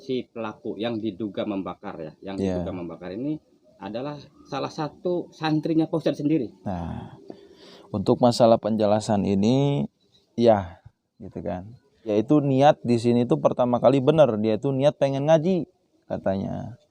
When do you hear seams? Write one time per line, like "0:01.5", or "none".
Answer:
0:12.1